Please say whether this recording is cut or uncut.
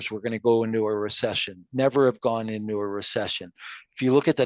uncut